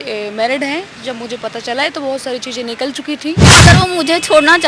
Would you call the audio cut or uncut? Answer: cut